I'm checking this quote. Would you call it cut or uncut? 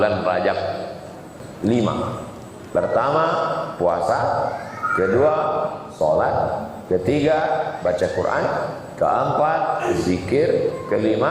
cut